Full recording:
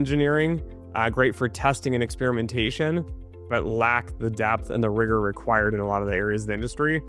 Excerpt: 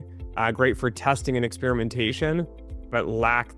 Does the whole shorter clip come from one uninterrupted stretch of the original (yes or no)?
yes